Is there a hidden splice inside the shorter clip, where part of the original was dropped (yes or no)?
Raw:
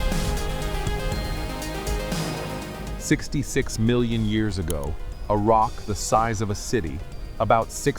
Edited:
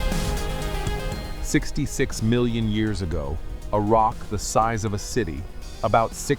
yes